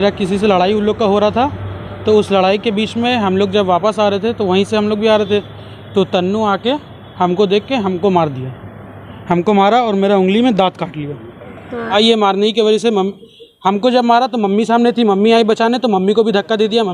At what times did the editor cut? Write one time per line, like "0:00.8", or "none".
0:11.9